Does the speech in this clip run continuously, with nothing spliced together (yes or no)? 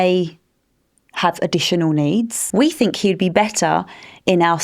no